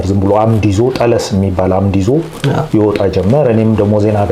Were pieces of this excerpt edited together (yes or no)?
no